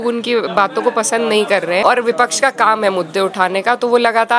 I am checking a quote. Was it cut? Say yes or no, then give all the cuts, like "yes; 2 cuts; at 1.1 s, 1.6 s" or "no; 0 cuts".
yes; 1 cut; at 1.8 s